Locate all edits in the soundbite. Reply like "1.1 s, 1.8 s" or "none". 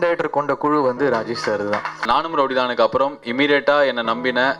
2.0 s